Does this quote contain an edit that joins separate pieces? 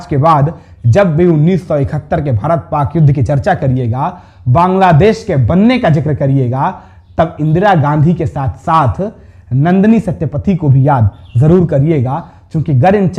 no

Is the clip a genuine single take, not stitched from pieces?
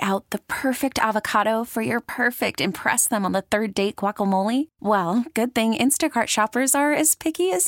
yes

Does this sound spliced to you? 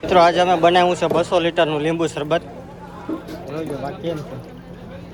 no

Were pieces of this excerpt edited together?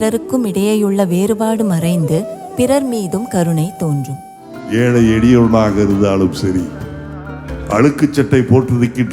yes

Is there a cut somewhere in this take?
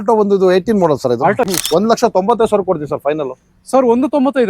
yes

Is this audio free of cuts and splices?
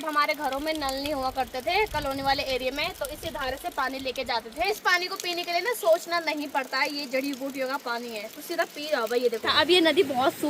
no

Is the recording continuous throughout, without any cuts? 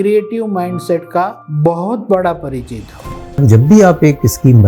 no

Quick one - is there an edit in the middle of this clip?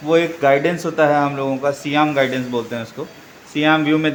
no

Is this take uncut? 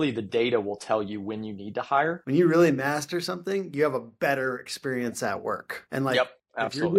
no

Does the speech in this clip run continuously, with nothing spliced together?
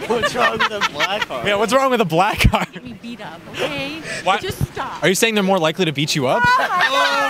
yes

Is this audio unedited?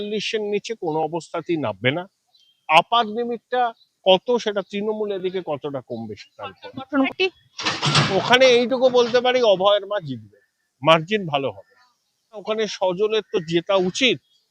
no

